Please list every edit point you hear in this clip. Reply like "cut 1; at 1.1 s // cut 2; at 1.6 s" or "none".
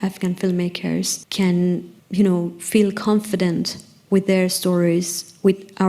cut 1; at 1.2 s // cut 2; at 2.0 s